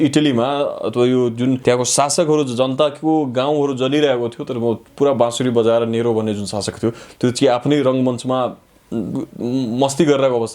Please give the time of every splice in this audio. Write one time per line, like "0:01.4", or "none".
0:01.6